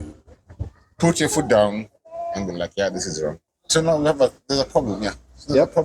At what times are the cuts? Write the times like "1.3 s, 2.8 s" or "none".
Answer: 3.5 s